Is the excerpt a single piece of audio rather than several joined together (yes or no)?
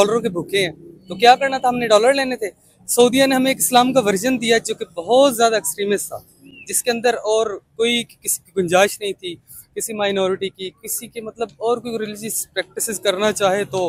yes